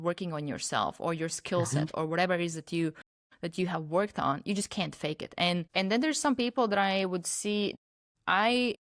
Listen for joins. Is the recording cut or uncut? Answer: uncut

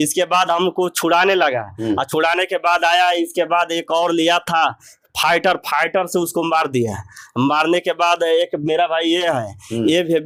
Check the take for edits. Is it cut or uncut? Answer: uncut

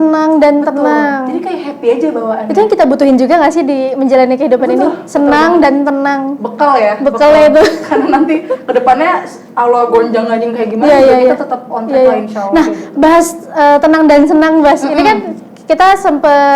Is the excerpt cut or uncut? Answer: uncut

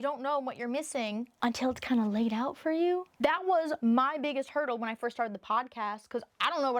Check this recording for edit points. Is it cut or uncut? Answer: cut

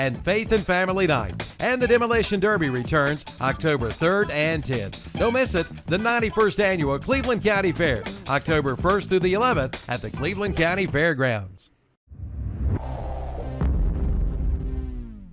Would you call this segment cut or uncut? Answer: cut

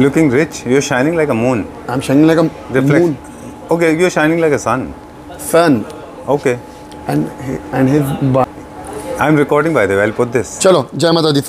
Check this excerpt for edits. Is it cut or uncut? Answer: cut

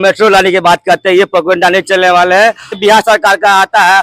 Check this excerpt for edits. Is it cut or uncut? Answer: cut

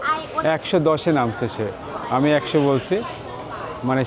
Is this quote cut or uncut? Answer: uncut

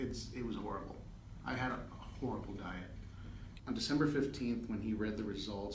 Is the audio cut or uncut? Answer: cut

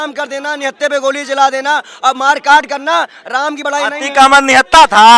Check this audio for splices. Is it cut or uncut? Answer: uncut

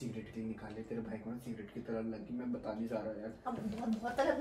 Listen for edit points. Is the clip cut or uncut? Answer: uncut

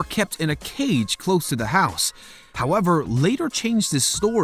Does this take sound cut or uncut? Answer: uncut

